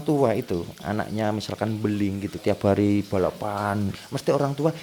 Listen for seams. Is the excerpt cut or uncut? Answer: cut